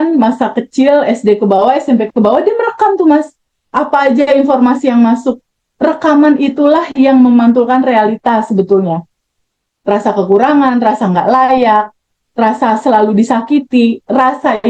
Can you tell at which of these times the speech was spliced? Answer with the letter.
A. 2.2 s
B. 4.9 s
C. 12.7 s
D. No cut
D